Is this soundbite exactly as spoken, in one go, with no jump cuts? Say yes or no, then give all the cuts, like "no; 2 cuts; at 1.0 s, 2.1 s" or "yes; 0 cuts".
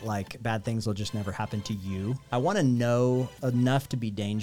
no; 2 cuts; at 2.2 s, 3.3 s